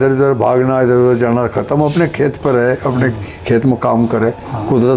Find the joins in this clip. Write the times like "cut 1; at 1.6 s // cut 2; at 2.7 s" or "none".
none